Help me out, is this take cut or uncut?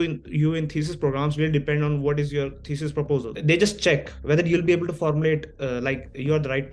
cut